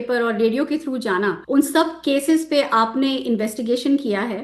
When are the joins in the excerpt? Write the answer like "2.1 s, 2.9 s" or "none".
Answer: 1.4 s